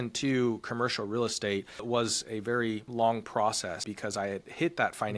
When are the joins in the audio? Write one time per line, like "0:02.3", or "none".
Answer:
0:01.8
0:02.9
0:03.9